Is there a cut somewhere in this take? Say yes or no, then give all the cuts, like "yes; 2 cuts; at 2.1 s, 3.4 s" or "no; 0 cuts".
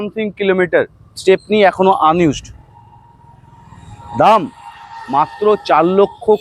no; 0 cuts